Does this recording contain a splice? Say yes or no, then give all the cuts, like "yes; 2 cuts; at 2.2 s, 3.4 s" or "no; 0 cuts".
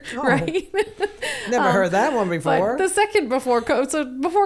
no; 0 cuts